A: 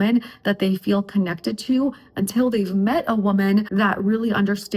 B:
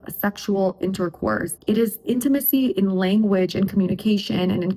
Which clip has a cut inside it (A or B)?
A